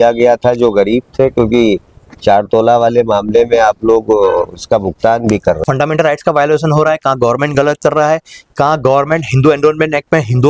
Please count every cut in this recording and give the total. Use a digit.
1